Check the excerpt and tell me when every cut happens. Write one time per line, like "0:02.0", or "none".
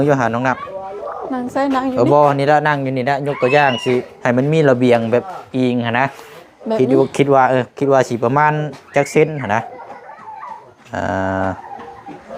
none

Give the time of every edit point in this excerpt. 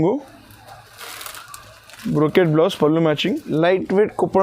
0:03.5

